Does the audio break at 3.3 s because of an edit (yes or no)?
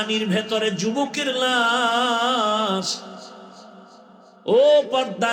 no